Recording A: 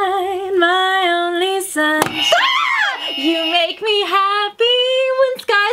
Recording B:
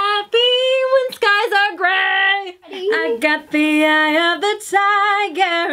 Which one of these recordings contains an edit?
B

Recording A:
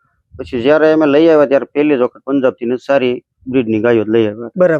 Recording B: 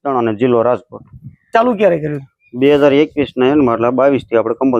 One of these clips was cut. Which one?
B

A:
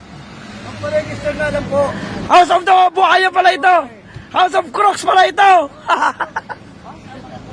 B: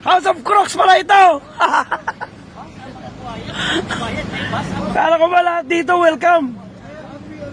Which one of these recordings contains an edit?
A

